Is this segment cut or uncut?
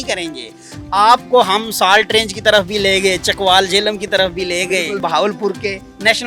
cut